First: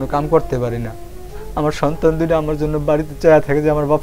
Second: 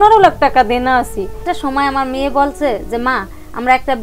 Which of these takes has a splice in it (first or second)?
second